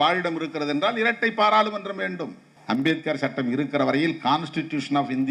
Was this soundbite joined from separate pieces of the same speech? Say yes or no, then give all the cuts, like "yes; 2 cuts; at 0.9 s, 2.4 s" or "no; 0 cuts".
yes; 1 cut; at 2.5 s